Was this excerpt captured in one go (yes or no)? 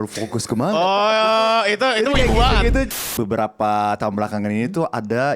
no